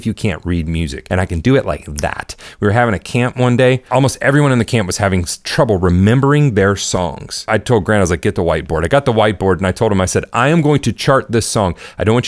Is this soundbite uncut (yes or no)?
no